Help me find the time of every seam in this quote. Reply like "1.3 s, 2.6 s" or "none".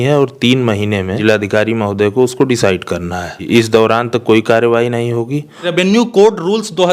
1.2 s, 3.4 s, 5.7 s